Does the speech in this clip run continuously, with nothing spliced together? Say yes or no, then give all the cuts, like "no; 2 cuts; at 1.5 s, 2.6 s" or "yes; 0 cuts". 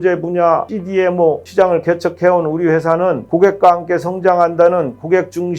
no; 2 cuts; at 1.1 s, 3.2 s